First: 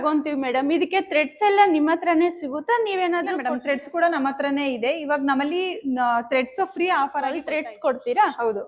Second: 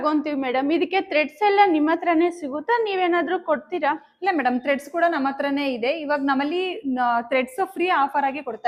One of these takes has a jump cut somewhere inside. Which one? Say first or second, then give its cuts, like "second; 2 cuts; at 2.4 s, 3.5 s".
first; 2 cuts; at 3.4 s, 7.4 s